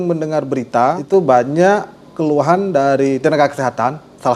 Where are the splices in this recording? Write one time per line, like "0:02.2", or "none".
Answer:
0:01.0